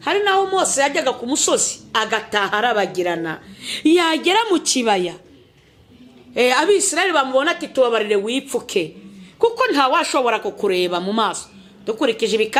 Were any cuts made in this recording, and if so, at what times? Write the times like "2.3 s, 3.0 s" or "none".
none